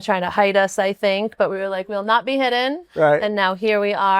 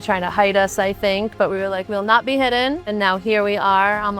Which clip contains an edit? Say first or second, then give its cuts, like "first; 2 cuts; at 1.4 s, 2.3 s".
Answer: second; 1 cut; at 2.9 s